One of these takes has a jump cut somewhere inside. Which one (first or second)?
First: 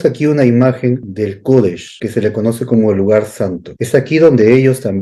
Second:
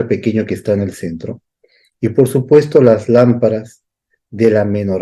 first